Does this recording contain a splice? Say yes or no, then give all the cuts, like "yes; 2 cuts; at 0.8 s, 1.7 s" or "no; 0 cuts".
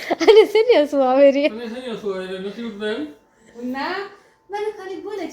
no; 0 cuts